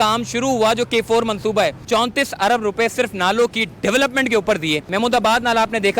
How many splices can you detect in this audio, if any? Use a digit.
2